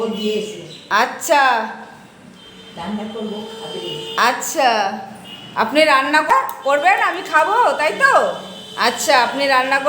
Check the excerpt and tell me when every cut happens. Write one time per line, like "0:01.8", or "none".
0:06.3